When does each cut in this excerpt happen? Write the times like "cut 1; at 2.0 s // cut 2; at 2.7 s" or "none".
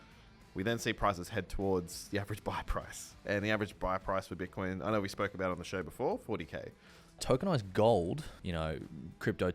cut 1; at 7.2 s // cut 2; at 8.4 s